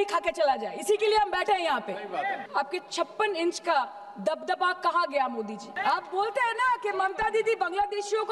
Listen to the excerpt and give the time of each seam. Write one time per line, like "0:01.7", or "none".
0:02.4
0:05.7